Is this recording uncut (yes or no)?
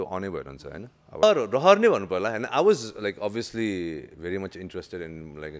no